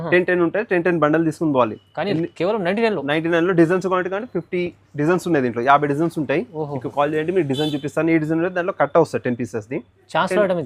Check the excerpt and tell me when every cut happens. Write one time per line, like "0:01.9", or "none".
none